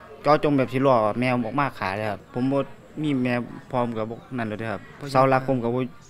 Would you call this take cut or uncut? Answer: cut